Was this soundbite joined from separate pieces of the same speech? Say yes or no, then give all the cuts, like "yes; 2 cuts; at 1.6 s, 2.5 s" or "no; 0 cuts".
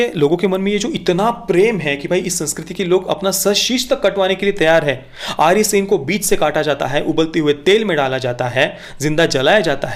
no; 0 cuts